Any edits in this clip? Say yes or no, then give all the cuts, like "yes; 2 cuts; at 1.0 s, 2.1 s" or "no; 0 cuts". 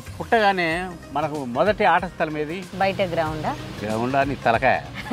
yes; 2 cuts; at 1.0 s, 2.7 s